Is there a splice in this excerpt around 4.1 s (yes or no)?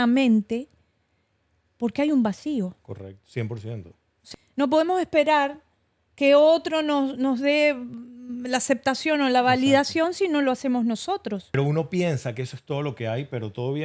yes